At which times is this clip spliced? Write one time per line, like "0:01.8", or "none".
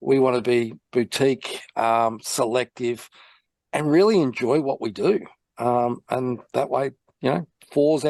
none

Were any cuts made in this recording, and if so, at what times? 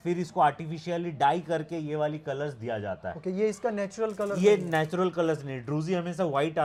none

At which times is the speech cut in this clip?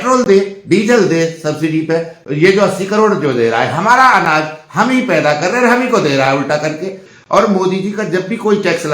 0:07.1

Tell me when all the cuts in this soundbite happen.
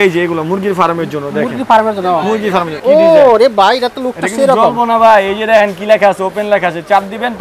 0:02.7

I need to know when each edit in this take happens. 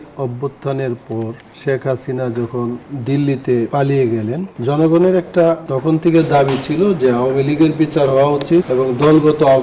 0:01.5
0:02.9
0:03.7
0:04.5
0:05.7
0:08.7

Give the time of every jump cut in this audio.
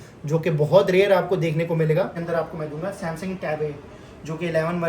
0:02.2

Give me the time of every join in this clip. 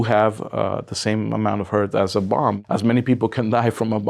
0:02.6

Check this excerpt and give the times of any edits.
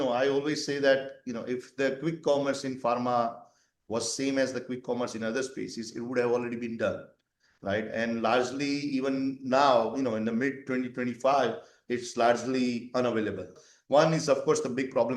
0:13.6

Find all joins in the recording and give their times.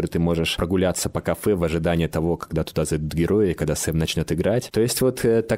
none

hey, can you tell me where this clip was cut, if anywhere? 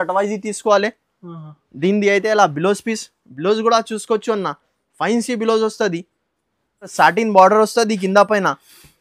0:06.9

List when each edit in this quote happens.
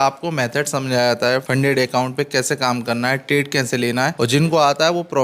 0:01.4
0:04.1

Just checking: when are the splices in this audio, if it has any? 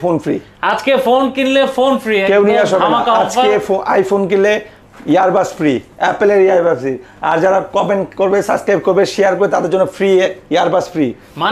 none

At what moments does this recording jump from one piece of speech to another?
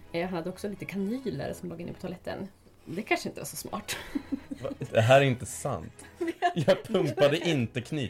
0:04.7

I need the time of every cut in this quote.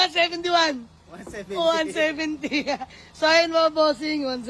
none

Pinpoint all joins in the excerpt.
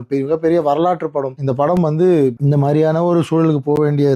0:01.4
0:02.4

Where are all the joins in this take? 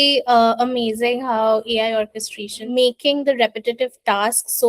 0:02.6

